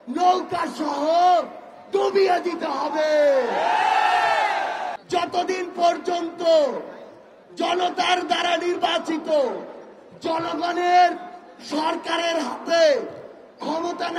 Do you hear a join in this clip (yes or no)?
yes